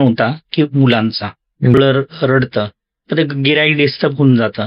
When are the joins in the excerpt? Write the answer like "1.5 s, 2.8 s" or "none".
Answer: 1.8 s